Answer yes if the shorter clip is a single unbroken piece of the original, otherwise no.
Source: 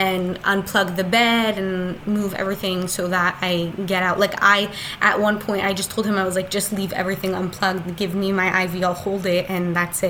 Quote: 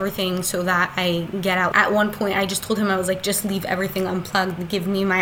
no